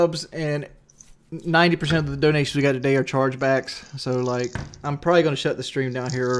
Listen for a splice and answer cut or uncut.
uncut